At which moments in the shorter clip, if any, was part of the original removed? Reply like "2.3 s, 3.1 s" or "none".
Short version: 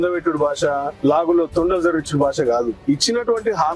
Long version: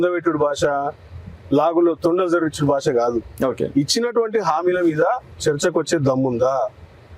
0.9 s, 2.8 s